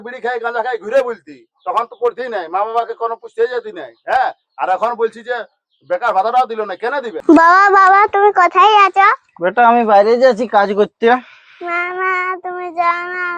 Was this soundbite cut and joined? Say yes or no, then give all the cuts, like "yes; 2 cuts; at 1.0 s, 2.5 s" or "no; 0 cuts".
yes; 1 cut; at 7.1 s